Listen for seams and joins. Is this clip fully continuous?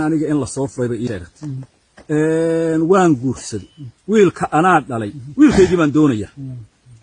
no; 1 cut; at 1.1 s

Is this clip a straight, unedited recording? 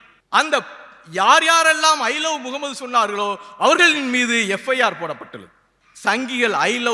yes; 0 cuts

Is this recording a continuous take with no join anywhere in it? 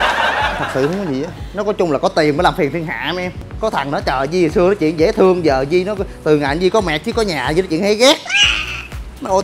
no; 1 cut; at 3.5 s

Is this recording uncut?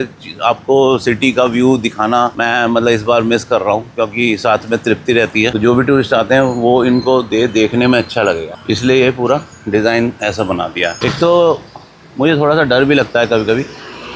no; 3 cuts; at 2.4 s, 5.5 s, 11.0 s

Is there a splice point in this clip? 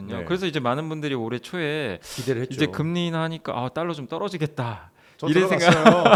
no; 0 cuts

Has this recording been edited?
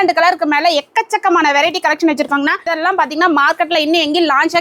yes; 1 cut; at 2.7 s

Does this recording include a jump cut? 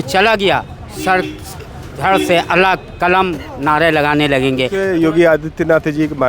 yes; 1 cut; at 4.8 s

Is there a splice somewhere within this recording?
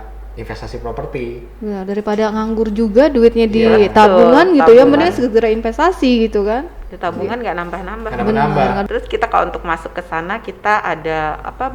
yes; 1 cut; at 8.8 s

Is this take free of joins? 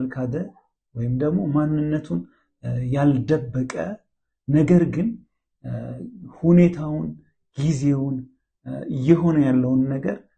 yes; 0 cuts

